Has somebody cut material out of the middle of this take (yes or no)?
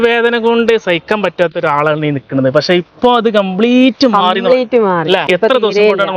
yes